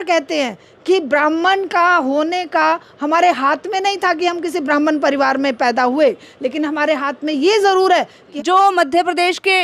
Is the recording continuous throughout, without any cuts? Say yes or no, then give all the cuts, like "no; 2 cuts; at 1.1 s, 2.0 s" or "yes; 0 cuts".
no; 1 cut; at 8.2 s